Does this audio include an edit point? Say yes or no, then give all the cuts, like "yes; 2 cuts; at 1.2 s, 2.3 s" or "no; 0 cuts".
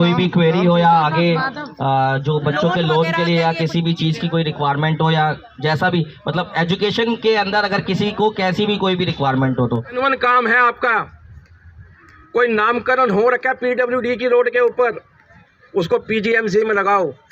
yes; 1 cut; at 9.9 s